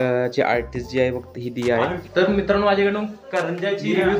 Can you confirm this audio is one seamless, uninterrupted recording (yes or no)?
no